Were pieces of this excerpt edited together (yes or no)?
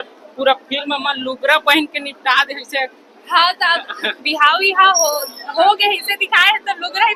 no